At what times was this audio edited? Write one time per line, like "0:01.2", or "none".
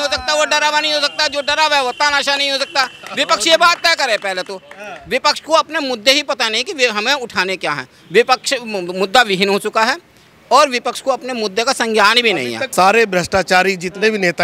0:12.6